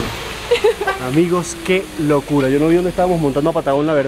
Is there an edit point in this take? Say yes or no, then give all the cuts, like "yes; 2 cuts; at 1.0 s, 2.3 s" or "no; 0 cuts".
no; 0 cuts